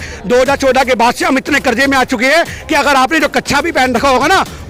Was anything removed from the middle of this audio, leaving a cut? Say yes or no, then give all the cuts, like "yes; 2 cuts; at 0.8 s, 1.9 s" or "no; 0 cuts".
no; 0 cuts